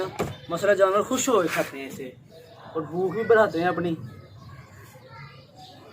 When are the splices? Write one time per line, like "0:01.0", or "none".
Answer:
none